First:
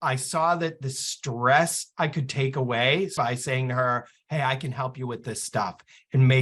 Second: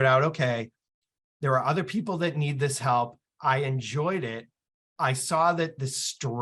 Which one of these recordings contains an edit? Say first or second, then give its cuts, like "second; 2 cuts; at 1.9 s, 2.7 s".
first; 1 cut; at 3.1 s